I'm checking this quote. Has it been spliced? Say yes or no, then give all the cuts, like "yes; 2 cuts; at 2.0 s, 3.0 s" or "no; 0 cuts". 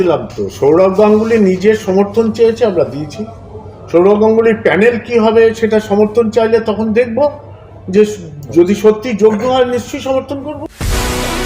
yes; 1 cut; at 10.5 s